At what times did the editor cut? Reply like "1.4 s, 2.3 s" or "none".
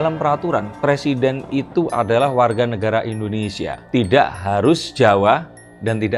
3.7 s